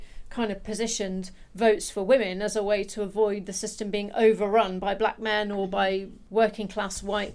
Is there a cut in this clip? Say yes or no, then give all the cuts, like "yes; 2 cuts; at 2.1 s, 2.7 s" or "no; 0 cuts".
yes; 1 cut; at 6.1 s